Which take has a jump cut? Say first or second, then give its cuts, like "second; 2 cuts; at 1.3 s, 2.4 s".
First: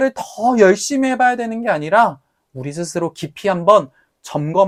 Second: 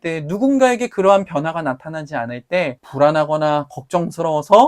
second; 1 cut; at 2.8 s